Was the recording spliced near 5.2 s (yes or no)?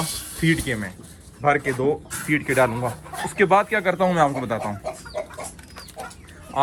no